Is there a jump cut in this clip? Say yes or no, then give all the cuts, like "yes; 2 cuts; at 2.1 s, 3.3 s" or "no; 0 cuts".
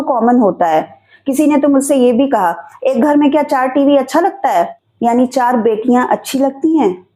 yes; 1 cut; at 4.8 s